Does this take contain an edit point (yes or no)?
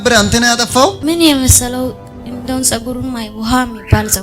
yes